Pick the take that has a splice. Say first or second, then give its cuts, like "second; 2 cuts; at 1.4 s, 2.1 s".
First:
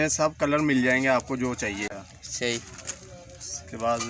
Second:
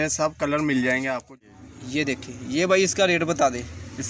second; 1 cut; at 1.3 s